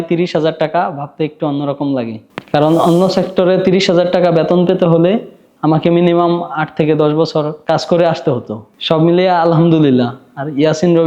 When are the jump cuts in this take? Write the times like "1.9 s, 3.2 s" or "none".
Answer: none